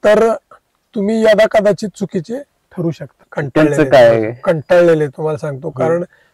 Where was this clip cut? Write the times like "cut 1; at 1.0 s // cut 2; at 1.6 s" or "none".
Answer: cut 1; at 3.1 s